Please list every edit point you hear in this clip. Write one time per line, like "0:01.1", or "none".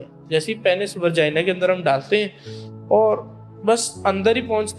none